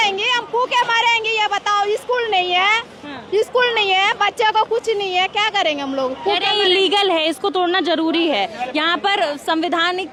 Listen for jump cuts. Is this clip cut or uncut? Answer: uncut